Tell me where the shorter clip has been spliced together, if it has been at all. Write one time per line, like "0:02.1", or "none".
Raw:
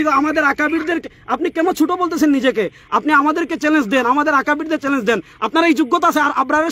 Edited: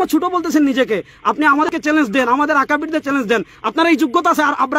0:01.7